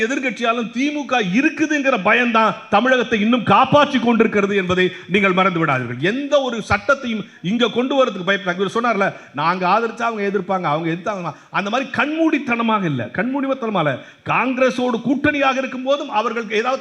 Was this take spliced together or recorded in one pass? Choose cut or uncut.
uncut